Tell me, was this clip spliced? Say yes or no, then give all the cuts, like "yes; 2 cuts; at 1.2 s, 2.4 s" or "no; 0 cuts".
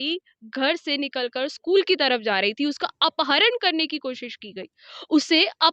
no; 0 cuts